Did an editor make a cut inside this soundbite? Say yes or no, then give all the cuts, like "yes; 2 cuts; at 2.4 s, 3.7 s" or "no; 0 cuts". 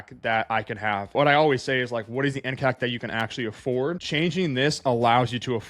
yes; 2 cuts; at 1.1 s, 4.0 s